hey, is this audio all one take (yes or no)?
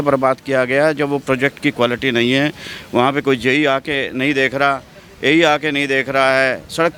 yes